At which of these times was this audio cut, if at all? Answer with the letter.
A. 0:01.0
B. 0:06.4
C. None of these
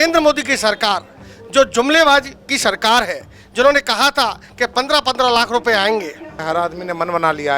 B